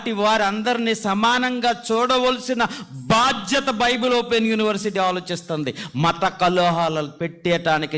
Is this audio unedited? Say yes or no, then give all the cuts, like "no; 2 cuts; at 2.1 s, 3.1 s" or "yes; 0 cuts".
yes; 0 cuts